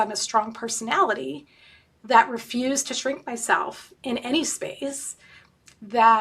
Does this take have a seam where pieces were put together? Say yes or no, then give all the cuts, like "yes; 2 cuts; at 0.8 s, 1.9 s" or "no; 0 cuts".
no; 0 cuts